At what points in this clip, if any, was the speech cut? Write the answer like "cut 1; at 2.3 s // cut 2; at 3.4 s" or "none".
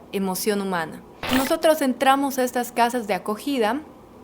cut 1; at 1.3 s